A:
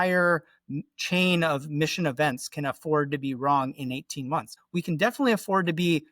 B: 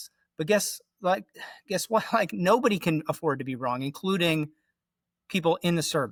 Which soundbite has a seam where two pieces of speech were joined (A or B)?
A